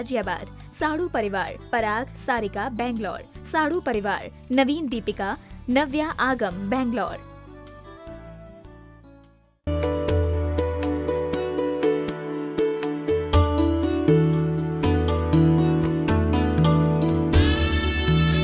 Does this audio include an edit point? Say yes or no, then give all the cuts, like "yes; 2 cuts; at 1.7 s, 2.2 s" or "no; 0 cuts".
yes; 2 cuts; at 1.9 s, 6.7 s